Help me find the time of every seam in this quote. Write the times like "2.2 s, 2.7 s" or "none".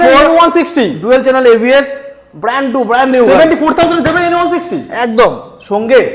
none